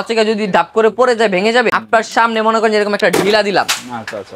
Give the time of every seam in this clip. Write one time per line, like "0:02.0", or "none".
0:01.8